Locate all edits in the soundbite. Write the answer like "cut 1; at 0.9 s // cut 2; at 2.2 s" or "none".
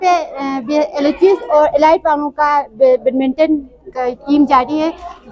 none